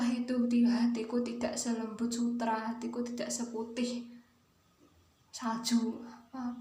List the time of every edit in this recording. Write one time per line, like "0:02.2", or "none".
none